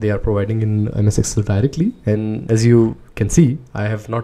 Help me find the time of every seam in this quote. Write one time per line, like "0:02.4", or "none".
0:00.9